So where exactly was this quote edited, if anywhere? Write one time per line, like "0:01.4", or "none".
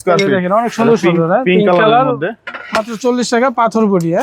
none